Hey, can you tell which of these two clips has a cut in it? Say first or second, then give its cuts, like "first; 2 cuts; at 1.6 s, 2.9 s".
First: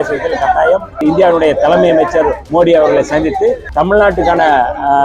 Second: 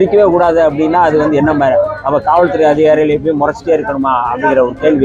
first; 3 cuts; at 1.0 s, 2.4 s, 3.6 s